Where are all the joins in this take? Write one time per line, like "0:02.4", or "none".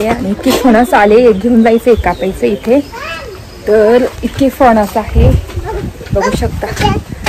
none